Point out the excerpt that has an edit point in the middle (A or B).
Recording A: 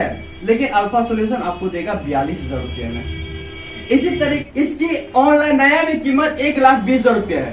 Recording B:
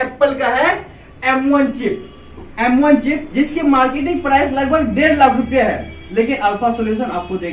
A